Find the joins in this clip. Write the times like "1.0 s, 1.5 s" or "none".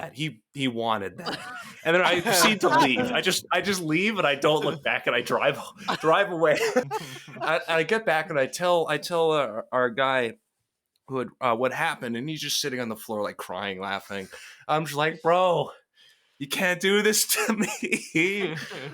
7.0 s